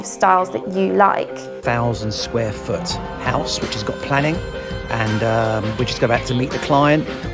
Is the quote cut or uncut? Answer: cut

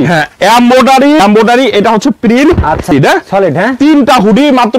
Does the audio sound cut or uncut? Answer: cut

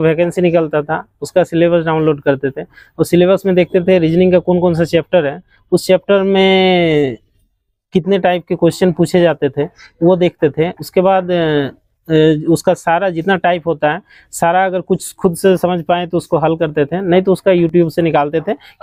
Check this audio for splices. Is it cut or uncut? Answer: uncut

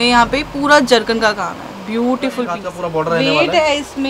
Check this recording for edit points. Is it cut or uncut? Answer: cut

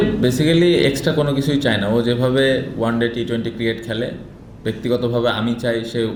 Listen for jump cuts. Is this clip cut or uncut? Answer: uncut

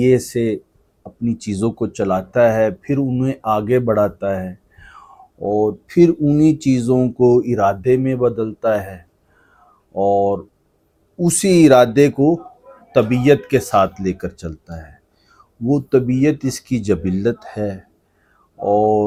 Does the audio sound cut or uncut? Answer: uncut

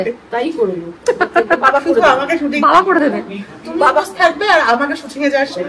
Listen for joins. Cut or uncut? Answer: uncut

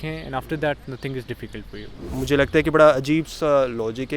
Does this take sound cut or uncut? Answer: cut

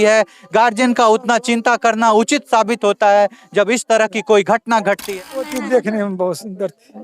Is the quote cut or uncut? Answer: cut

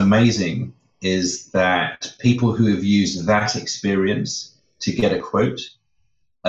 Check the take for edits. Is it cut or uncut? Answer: uncut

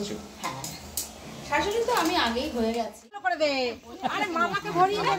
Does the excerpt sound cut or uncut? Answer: cut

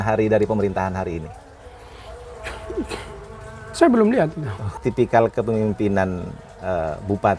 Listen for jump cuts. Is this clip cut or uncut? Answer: cut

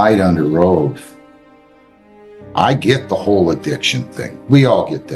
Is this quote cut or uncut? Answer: uncut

